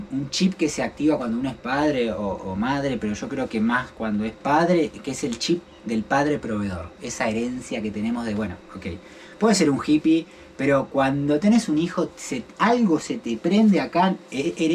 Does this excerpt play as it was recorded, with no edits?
yes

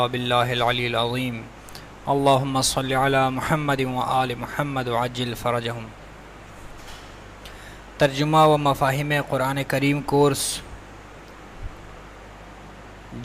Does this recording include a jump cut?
yes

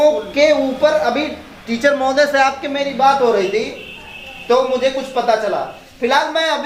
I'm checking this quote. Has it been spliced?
no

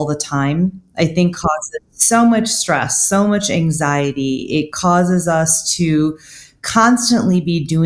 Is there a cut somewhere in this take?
yes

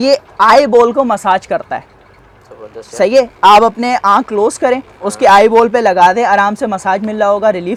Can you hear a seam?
no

